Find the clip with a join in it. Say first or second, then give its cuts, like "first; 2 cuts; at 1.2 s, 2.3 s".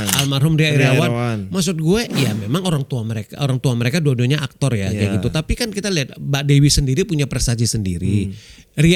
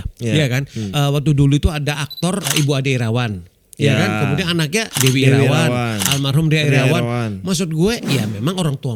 second; 3 cuts; at 0.9 s, 2.5 s, 4.9 s